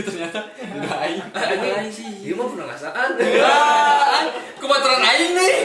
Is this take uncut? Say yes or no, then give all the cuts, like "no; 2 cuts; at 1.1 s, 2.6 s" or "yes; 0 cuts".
yes; 0 cuts